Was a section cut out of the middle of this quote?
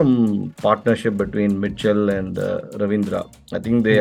no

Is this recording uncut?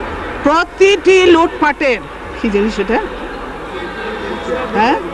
yes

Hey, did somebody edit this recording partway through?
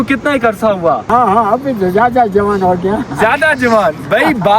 yes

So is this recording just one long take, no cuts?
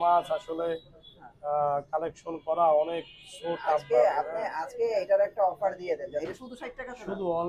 no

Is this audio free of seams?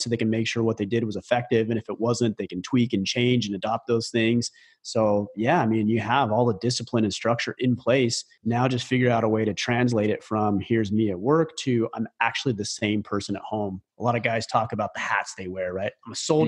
no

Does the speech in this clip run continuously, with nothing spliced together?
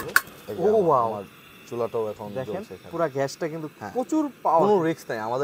yes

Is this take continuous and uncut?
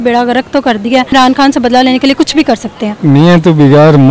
no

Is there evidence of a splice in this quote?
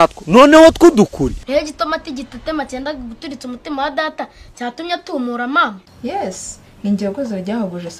yes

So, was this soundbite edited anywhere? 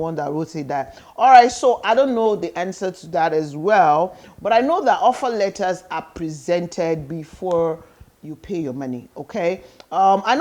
no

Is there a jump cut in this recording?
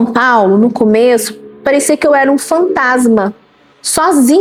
no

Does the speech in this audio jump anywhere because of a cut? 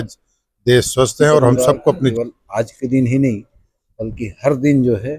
yes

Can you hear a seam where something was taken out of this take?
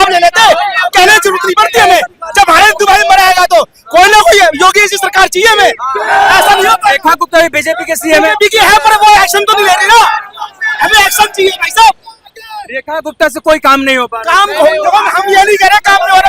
no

